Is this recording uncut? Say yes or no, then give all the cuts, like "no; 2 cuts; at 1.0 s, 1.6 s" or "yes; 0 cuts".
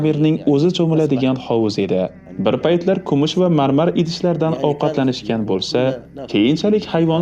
no; 1 cut; at 2.2 s